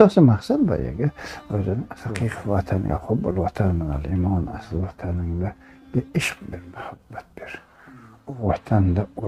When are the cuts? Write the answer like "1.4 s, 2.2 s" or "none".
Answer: 2.0 s